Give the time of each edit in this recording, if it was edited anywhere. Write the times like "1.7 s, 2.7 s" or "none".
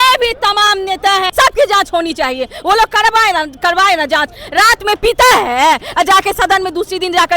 1.3 s